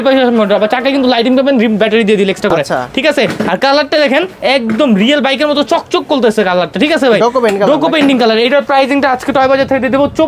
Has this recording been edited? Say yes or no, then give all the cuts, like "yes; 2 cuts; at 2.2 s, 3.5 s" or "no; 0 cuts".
no; 0 cuts